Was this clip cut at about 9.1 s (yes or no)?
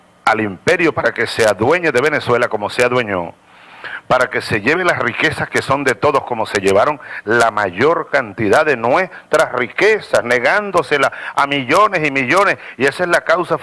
yes